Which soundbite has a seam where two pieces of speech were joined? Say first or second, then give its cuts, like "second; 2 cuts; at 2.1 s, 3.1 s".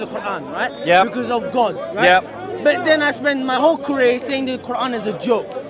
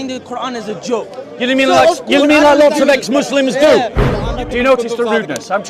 second; 1 cut; at 4.1 s